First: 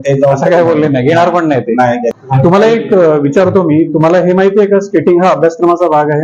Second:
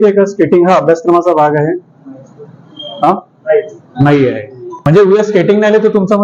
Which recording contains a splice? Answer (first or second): first